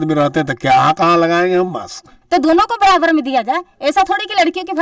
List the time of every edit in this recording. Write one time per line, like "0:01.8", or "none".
0:02.1